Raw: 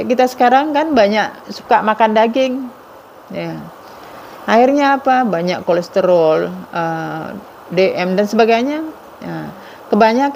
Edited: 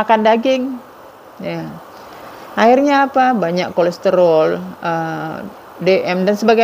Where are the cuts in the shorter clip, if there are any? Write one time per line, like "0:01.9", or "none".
none